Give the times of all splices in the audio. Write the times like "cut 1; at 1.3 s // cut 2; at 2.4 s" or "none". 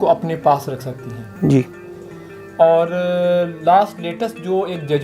none